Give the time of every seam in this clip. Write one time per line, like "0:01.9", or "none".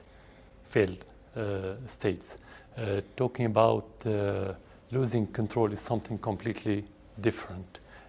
0:03.2